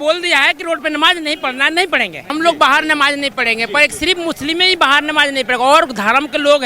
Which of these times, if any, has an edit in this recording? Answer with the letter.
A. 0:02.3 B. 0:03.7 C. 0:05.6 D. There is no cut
A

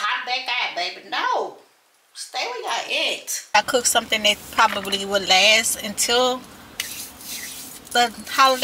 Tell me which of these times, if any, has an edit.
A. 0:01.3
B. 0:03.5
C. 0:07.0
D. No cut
B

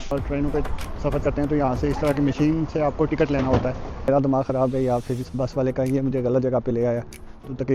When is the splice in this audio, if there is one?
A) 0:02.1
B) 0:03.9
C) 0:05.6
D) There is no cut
B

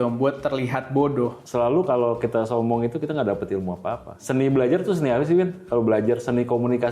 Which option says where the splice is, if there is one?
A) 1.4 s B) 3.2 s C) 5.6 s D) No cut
A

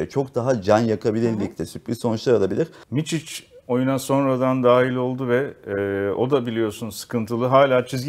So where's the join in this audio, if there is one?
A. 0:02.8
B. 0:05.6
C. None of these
A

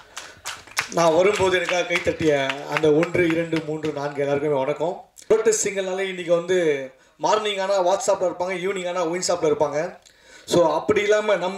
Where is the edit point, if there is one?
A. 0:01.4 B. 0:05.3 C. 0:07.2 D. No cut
B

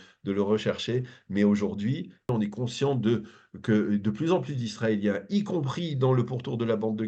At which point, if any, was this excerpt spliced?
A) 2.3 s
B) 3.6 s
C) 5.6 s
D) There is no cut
A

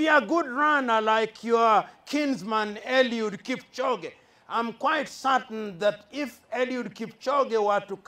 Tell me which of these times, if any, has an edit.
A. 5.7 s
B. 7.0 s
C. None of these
C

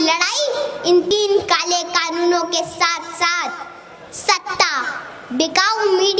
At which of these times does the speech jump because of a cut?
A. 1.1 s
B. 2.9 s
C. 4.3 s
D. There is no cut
A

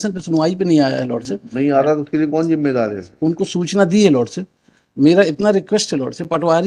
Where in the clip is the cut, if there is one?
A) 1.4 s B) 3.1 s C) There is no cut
C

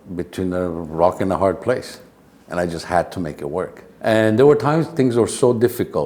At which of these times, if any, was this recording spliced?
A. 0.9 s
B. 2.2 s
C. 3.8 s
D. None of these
C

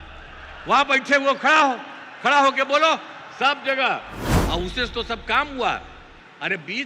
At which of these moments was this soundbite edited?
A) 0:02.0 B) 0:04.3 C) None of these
B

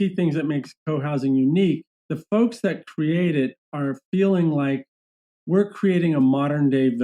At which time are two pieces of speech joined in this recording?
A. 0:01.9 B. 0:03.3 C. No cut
A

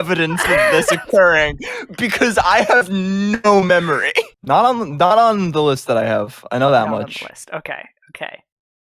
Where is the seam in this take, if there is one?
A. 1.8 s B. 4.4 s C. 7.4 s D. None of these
B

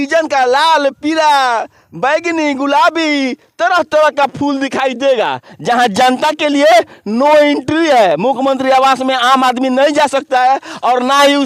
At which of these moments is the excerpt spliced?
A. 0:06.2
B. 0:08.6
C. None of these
C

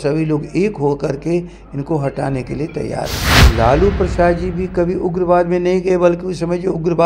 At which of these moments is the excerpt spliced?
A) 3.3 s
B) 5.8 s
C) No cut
A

